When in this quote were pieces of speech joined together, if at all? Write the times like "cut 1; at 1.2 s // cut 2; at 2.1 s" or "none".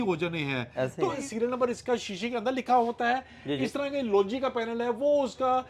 cut 1; at 1.2 s